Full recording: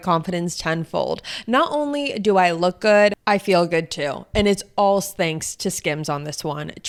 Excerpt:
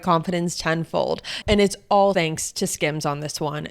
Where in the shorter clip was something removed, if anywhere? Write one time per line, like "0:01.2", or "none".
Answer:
0:01.3
0:02.1